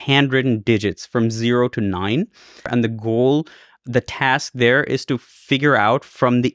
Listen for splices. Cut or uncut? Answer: cut